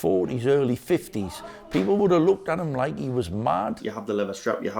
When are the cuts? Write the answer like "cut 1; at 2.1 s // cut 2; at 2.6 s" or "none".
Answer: cut 1; at 3.9 s